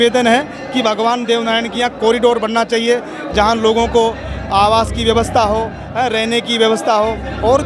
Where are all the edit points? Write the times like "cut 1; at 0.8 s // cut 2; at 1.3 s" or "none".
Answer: none